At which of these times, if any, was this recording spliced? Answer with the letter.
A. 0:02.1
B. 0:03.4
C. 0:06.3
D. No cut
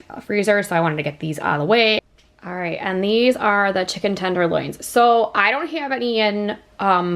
A